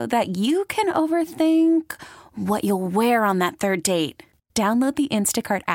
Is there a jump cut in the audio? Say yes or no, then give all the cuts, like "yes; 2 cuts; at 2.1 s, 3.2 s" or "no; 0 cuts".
no; 0 cuts